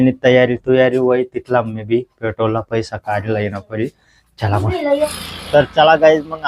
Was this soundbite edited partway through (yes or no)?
yes